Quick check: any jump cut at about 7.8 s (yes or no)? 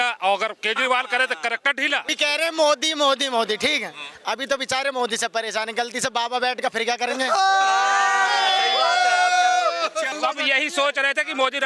no